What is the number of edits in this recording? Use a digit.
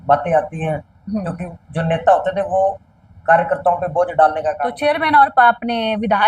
1